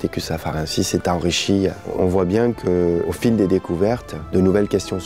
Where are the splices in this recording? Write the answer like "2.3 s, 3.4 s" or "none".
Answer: 1.9 s, 3.1 s, 4.1 s